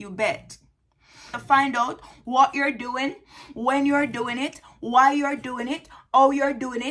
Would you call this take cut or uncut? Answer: cut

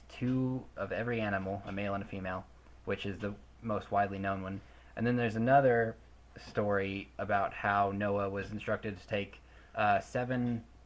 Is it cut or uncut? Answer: uncut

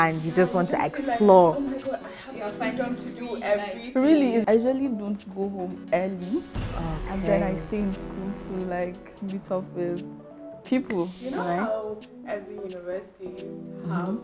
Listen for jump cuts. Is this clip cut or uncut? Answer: cut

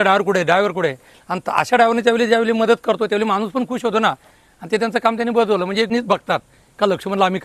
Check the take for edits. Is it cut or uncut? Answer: cut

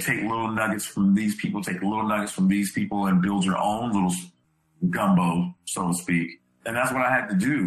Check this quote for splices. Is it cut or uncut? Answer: cut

